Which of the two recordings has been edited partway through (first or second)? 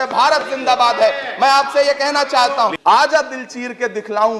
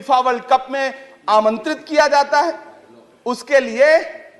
first